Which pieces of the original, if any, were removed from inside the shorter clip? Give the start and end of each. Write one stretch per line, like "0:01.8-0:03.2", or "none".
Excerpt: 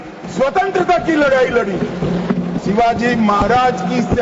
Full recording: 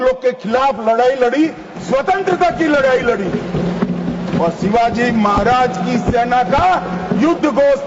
0:04.1-0:04.6